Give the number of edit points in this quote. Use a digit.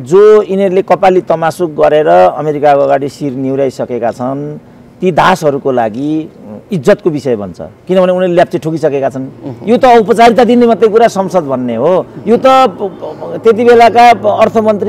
0